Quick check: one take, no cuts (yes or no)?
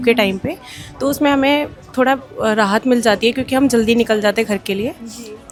yes